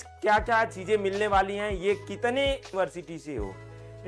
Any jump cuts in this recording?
yes; 1 cut; at 2.7 s

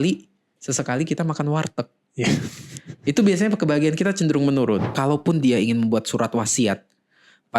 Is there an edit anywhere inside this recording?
yes; 1 cut; at 4.9 s

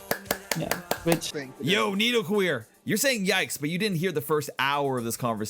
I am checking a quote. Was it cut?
yes; 1 cut; at 1.4 s

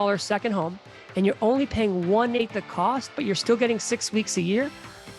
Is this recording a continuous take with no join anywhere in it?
no; 1 cut; at 2.4 s

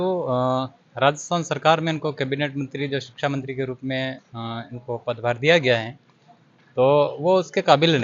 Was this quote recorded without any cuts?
yes; 0 cuts

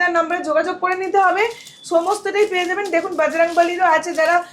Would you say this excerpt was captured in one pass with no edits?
yes; 0 cuts

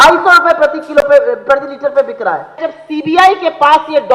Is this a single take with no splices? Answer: no; 1 cut; at 2.7 s

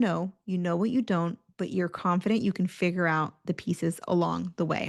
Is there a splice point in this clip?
no; 0 cuts

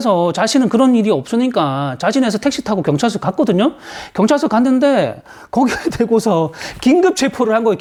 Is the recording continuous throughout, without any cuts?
yes; 0 cuts

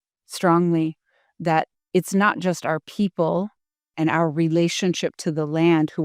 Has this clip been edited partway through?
yes; 1 cut; at 3.9 s

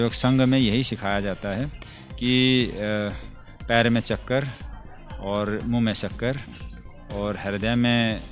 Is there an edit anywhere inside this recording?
no; 0 cuts

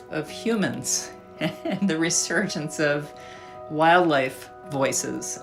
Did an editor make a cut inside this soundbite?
no; 0 cuts

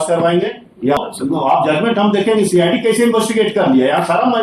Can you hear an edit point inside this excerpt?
yes; 1 cut; at 1.0 s

